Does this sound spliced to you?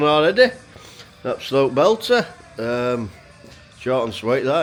no; 0 cuts

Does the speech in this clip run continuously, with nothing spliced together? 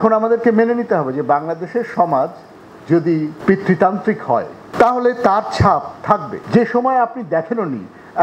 no; 2 cuts; at 3.3 s, 6.3 s

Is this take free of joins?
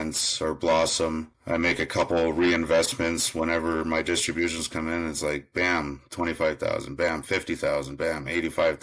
yes; 0 cuts

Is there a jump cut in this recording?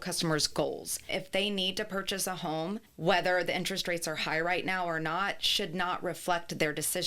yes; 2 cuts; at 0.9 s, 2.9 s

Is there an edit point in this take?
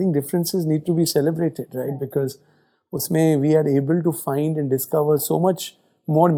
no; 0 cuts

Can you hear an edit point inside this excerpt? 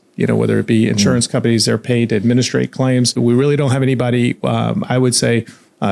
yes; 1 cut; at 3.1 s

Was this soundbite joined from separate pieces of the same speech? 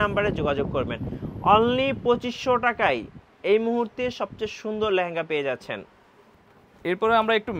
no; 0 cuts

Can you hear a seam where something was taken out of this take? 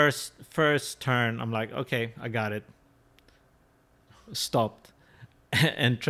no; 0 cuts

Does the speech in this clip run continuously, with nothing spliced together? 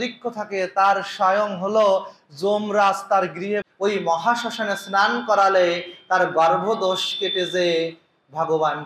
no; 1 cut; at 3.7 s

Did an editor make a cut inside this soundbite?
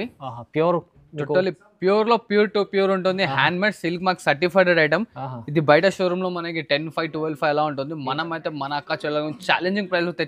no; 0 cuts

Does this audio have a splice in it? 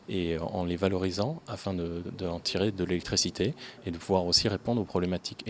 no; 0 cuts

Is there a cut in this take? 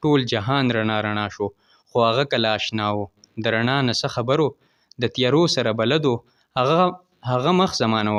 no; 0 cuts

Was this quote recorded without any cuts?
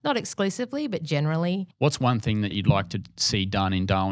no; 2 cuts; at 1.7 s, 2.5 s

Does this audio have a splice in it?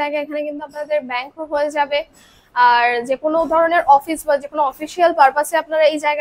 no; 0 cuts

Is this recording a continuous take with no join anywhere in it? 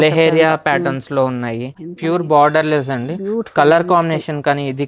no; 1 cut; at 1.7 s

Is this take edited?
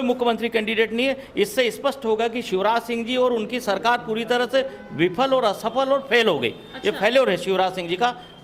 no; 0 cuts

